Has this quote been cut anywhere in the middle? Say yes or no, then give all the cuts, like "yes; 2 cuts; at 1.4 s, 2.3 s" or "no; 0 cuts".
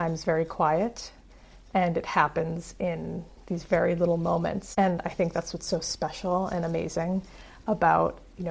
yes; 1 cut; at 4.6 s